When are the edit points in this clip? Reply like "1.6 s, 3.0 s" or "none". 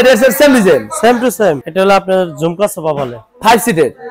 1.7 s